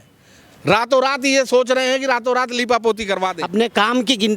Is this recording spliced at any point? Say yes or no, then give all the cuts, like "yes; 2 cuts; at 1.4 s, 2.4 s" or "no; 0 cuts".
yes; 1 cut; at 3.4 s